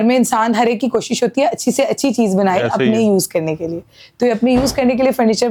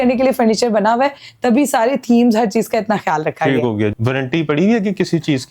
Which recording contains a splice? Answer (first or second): second